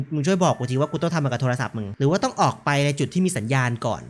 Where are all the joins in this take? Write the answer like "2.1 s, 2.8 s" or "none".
none